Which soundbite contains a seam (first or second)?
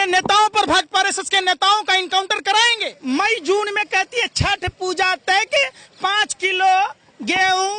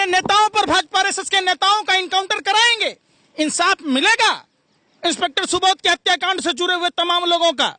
first